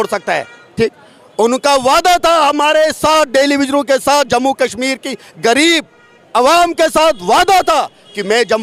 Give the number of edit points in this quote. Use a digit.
0